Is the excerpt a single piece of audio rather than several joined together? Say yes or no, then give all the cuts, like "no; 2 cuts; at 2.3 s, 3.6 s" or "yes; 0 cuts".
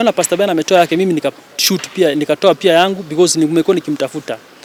yes; 0 cuts